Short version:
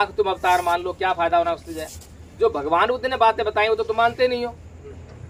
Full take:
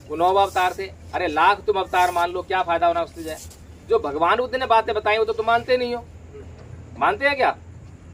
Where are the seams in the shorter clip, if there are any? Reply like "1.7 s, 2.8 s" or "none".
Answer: none